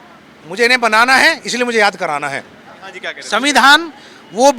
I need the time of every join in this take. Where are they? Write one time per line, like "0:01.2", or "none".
0:03.1